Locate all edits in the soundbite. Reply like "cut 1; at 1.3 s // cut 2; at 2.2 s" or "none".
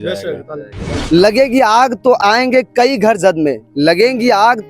cut 1; at 1.1 s